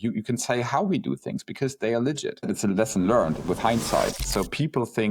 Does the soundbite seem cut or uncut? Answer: cut